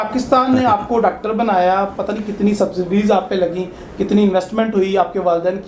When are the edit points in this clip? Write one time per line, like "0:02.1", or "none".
none